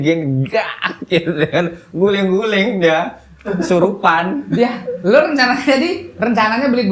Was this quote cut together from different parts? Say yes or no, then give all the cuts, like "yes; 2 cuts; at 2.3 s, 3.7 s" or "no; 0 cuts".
no; 0 cuts